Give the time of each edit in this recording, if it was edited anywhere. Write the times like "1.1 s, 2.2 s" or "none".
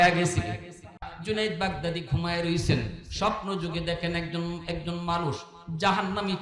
1.1 s